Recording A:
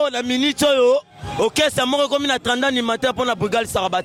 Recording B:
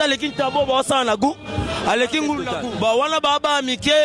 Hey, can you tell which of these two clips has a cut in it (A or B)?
B